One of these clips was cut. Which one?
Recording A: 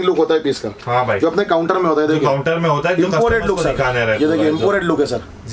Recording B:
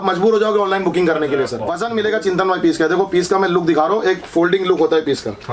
B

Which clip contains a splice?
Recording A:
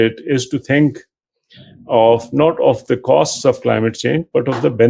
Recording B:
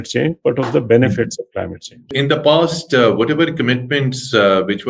B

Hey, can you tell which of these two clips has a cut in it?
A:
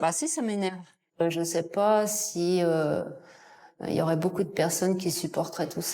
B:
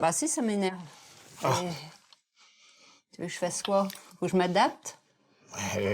A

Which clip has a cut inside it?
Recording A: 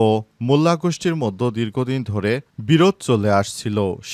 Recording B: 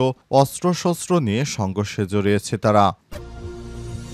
B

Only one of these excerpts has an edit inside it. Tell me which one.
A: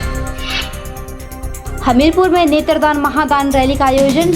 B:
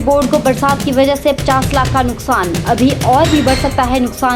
A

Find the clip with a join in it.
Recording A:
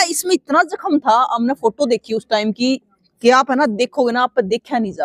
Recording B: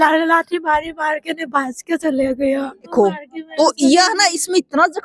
B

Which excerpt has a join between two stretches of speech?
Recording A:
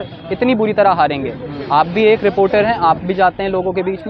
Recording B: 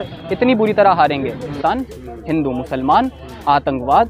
B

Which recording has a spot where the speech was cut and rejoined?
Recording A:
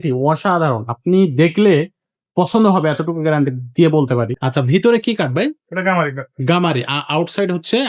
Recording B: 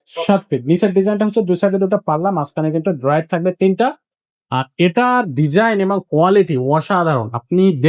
A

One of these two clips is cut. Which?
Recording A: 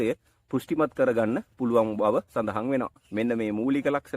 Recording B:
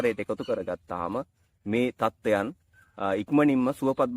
A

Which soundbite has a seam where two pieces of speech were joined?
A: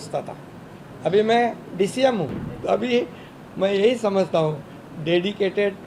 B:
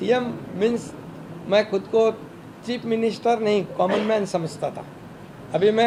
A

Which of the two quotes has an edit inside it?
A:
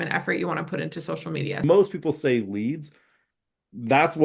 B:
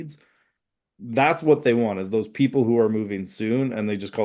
A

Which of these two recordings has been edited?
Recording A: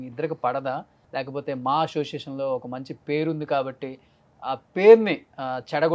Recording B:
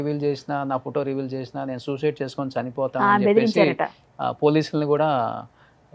A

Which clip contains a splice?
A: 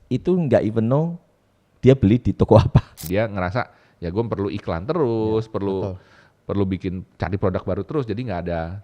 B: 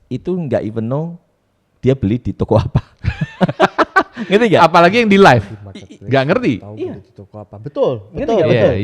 A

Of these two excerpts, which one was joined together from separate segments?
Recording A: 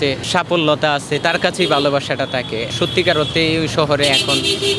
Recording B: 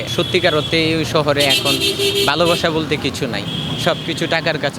B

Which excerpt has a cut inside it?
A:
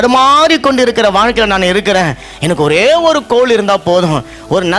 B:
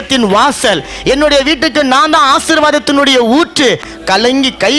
B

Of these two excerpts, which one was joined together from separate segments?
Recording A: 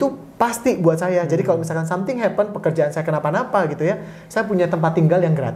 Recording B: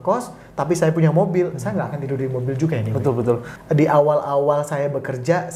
B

